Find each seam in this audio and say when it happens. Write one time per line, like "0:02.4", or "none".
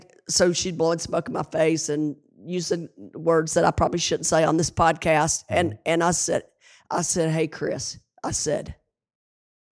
none